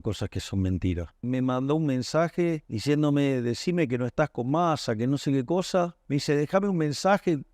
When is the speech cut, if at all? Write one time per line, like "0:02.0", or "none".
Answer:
0:01.2
0:02.7
0:06.0